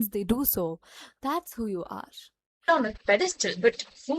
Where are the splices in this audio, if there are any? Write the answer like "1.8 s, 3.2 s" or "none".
2.6 s